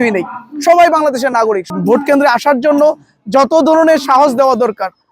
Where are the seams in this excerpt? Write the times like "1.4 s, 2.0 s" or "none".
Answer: 1.7 s